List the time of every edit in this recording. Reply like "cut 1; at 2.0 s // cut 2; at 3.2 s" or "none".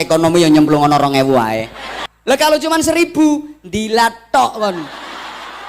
cut 1; at 2.1 s